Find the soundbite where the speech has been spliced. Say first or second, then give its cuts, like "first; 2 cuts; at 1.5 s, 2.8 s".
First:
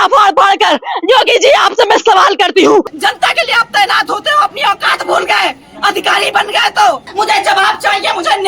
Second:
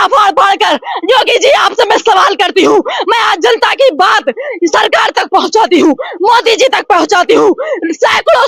first; 2 cuts; at 2.9 s, 7.1 s